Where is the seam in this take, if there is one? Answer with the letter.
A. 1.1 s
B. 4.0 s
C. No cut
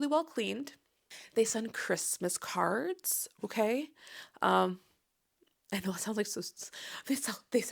A